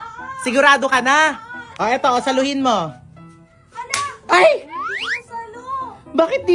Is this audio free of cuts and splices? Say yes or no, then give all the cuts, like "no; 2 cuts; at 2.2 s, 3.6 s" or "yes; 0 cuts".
yes; 0 cuts